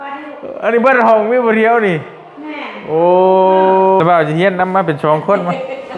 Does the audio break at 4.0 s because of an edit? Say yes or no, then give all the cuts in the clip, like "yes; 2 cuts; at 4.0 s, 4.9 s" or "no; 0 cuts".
yes; 1 cut; at 4.0 s